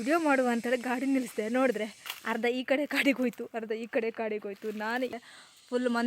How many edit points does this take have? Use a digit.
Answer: 1